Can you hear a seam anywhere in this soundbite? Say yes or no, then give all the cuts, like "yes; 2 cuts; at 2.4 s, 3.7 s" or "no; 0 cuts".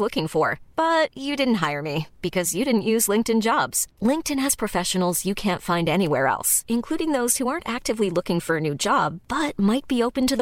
no; 0 cuts